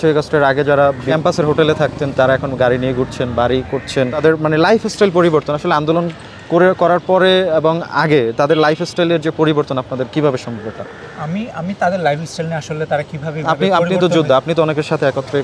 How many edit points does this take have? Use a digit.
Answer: 0